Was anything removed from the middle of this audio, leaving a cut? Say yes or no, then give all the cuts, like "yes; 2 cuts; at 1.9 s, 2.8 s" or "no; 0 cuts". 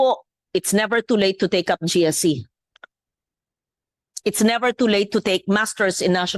no; 0 cuts